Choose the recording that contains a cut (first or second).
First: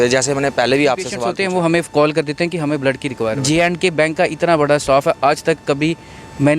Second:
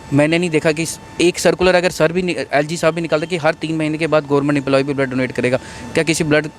first